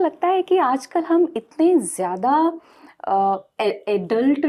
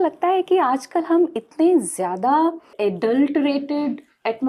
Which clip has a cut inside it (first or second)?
second